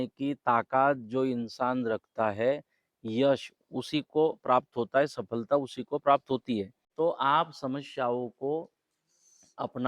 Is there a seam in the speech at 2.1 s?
no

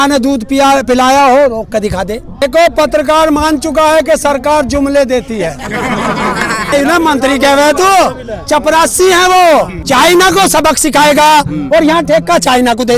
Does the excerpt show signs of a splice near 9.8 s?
yes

